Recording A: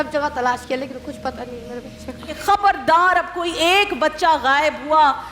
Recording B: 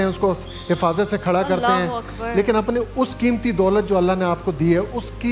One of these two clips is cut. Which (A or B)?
A